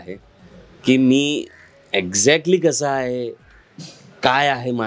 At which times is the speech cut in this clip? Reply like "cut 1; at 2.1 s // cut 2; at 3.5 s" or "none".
none